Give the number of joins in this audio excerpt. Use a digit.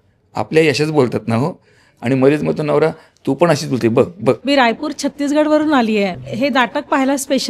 1